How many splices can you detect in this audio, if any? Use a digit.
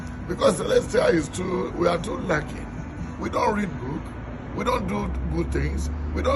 0